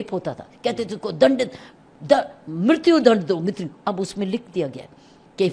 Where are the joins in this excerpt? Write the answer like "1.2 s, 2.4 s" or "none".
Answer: none